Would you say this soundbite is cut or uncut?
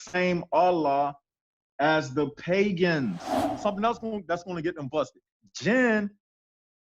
cut